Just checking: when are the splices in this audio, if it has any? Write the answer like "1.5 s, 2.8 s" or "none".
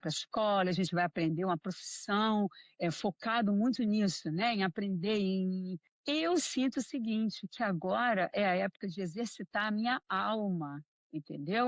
none